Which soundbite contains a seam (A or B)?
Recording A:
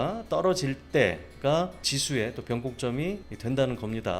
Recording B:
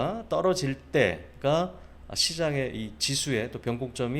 A